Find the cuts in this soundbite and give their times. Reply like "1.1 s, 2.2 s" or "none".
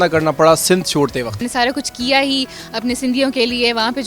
1.4 s